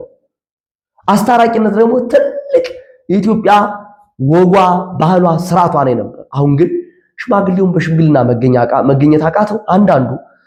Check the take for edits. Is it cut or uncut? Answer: uncut